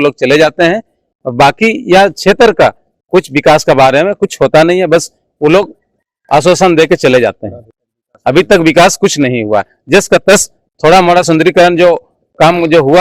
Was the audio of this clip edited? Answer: no; 0 cuts

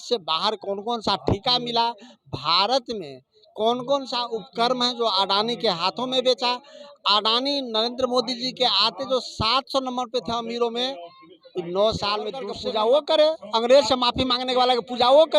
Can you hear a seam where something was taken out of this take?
yes; 1 cut; at 12.5 s

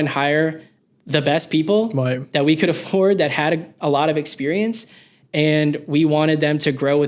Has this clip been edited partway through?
no; 0 cuts

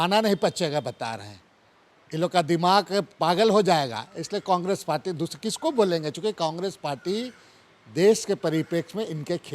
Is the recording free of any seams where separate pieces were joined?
yes; 0 cuts

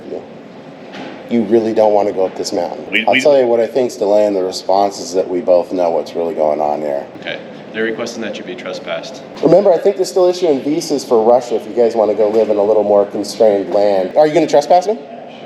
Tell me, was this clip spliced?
yes; 4 cuts; at 2.9 s, 7.2 s, 9.3 s, 14.1 s

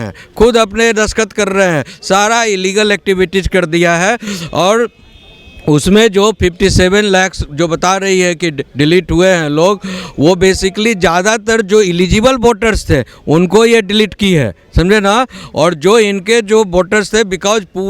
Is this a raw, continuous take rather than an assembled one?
yes; 0 cuts

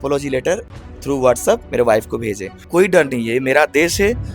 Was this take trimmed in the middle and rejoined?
yes; 1 cut; at 2.6 s

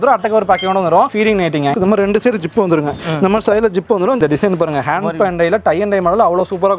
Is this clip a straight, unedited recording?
no; 2 cuts; at 1.7 s, 4.2 s

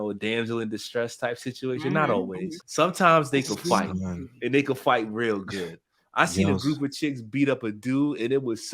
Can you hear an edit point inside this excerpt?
yes; 1 cut; at 2.6 s

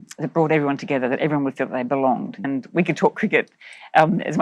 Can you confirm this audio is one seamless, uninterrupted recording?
no; 1 cut; at 2.4 s

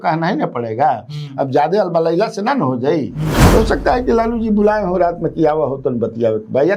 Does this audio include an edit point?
yes; 1 cut; at 3.4 s

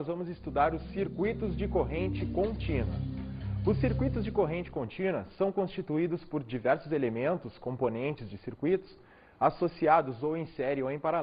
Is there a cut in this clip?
yes; 1 cut; at 4.3 s

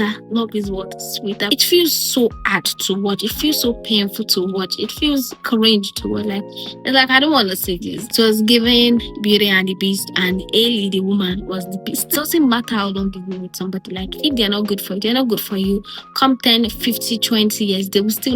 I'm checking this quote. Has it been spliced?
yes; 3 cuts; at 1.5 s, 8.0 s, 12.1 s

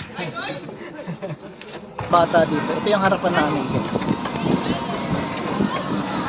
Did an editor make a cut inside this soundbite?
yes; 1 cut; at 2.1 s

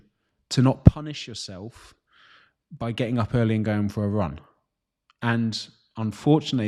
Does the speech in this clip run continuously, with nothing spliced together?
yes; 0 cuts

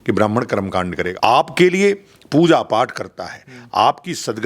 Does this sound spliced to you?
yes; 1 cut; at 1.1 s

